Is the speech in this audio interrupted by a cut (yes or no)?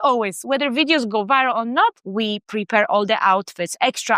yes